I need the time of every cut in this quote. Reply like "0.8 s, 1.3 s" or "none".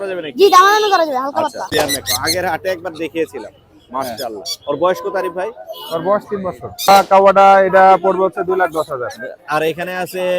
1.7 s, 6.9 s